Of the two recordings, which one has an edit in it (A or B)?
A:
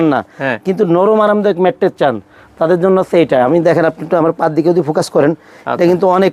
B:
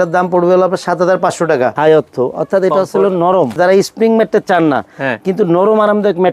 B